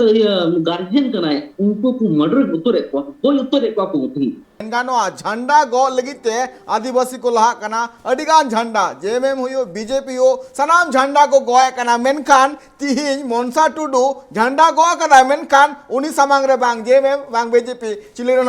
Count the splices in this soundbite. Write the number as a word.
one